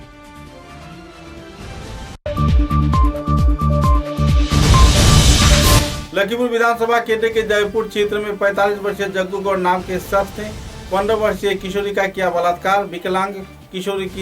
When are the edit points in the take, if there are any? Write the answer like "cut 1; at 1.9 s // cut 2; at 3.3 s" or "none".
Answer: cut 1; at 2.2 s // cut 2; at 5.8 s

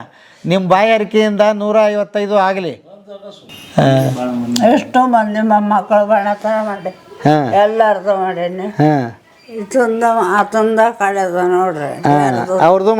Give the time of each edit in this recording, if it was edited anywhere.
cut 1; at 3.5 s

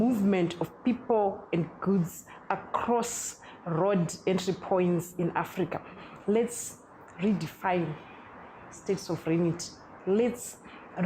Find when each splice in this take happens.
cut 1; at 6.0 s

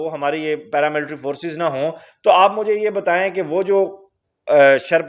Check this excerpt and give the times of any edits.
none

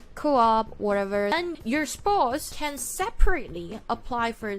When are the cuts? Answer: cut 1; at 1.3 s // cut 2; at 2.5 s

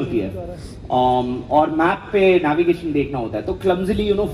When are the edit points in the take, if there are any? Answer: none

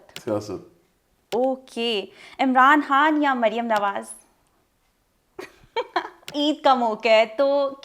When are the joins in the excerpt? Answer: cut 1; at 6.3 s

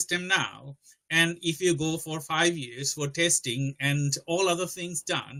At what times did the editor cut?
none

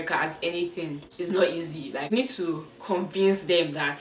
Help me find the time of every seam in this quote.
cut 1; at 1.0 s // cut 2; at 2.1 s

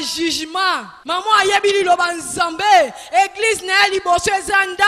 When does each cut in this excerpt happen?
cut 1; at 0.9 s

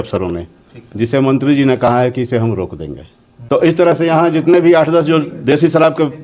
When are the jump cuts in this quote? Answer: cut 1; at 3.6 s

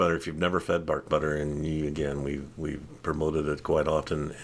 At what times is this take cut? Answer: none

